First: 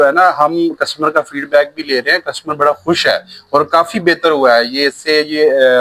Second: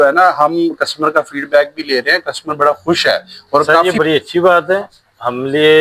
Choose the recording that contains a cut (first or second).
second